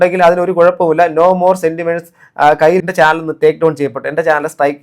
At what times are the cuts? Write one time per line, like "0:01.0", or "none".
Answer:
0:02.8